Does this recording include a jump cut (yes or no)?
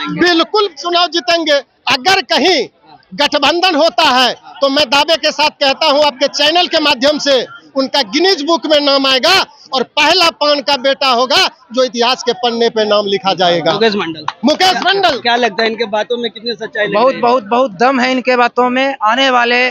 no